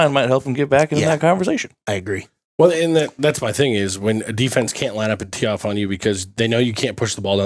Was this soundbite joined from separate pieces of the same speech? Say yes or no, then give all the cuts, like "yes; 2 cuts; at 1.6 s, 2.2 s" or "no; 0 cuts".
no; 0 cuts